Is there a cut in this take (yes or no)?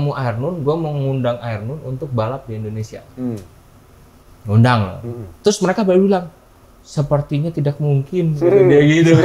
no